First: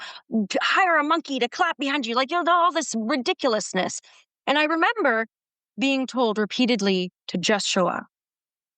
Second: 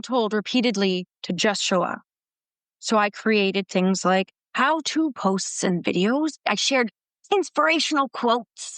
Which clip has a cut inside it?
second; 1 cut; at 6.5 s

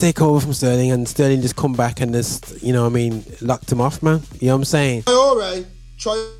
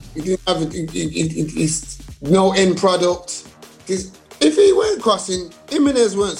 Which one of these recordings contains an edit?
first; 1 cut; at 5.1 s

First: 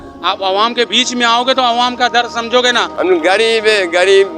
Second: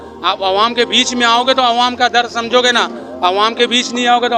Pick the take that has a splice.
first; 1 cut; at 2.9 s

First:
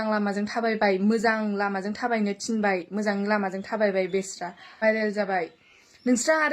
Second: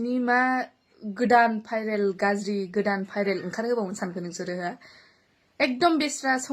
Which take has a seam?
first; 1 cut; at 4.8 s

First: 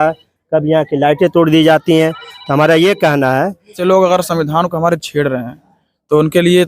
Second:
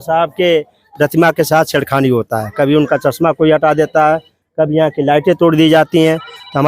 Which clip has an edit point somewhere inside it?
first; 1 cut; at 3.8 s

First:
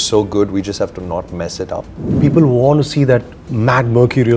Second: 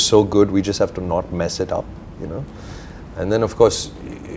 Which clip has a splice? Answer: first; 1 cut; at 2.0 s

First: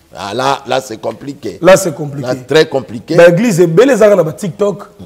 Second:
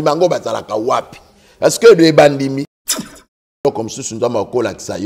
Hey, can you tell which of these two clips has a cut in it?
second; 1 cut; at 2.9 s

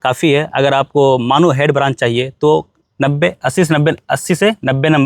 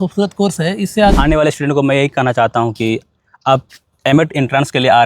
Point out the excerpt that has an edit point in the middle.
second; 1 cut; at 1.1 s

